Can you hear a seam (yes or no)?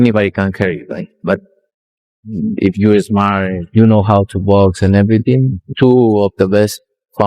yes